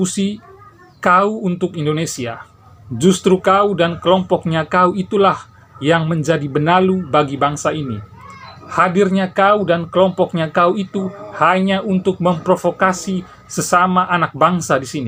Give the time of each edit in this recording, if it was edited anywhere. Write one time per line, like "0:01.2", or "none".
none

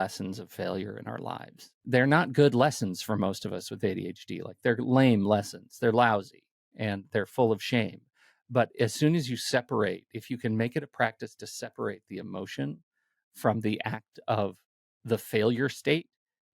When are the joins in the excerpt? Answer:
0:01.8

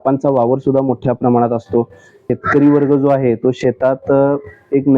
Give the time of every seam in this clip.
0:02.2

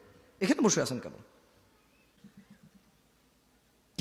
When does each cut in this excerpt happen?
0:02.2

